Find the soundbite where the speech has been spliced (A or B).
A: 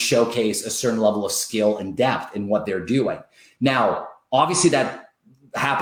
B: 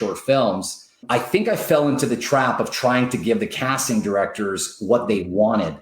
B